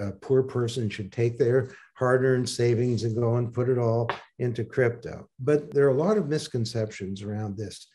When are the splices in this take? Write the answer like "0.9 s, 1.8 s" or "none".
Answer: 5.5 s